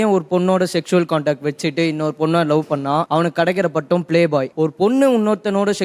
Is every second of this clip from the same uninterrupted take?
no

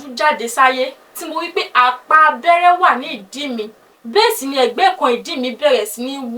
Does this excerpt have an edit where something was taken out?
no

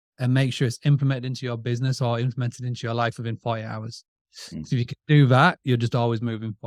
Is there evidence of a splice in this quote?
no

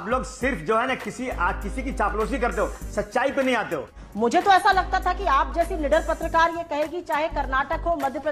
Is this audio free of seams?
no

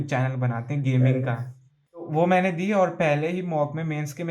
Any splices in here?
yes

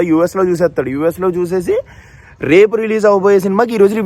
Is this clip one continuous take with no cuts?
yes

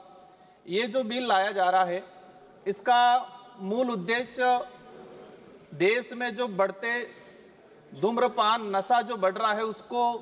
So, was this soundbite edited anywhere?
no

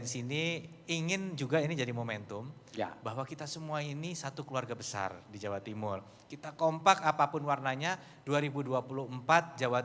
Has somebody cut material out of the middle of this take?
no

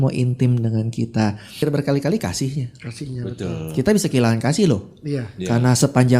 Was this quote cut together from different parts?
yes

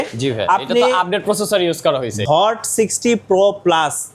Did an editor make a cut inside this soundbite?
yes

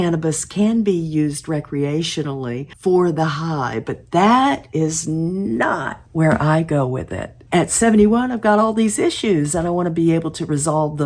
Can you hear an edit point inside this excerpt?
yes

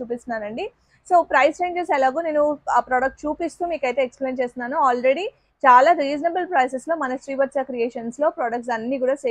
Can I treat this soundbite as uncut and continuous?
yes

